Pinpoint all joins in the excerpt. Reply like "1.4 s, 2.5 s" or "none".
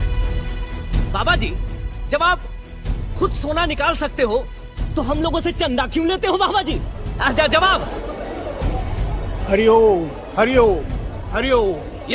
none